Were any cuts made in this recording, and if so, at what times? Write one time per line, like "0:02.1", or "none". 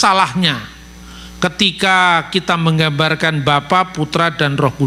none

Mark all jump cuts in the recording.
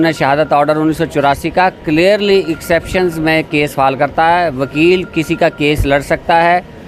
none

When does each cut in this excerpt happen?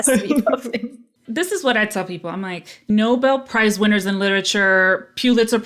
0:01.2
0:02.9

